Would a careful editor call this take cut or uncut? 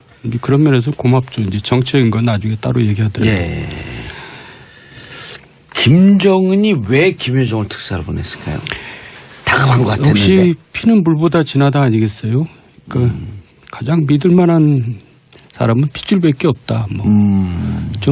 cut